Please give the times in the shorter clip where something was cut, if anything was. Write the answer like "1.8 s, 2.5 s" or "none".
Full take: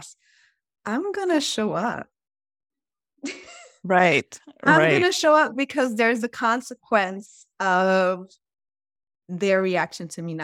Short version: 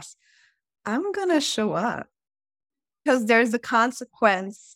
3.0 s